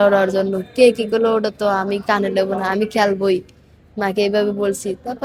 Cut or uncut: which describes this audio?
uncut